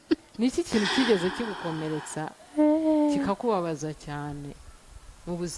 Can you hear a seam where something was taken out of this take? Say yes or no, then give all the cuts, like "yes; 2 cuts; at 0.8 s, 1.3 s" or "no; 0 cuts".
no; 0 cuts